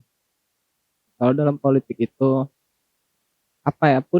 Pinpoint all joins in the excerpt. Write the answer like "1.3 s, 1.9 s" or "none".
1.0 s